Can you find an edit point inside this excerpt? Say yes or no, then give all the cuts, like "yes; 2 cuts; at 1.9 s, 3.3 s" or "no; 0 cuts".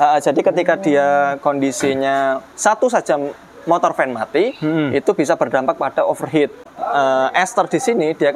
yes; 1 cut; at 6.7 s